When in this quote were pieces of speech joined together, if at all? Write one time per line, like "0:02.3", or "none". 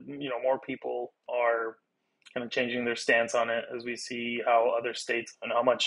0:01.2